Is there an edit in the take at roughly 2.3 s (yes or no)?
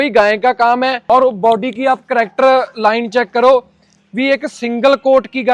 no